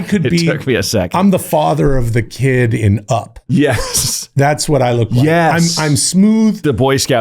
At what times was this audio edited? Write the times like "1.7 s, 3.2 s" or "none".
3.3 s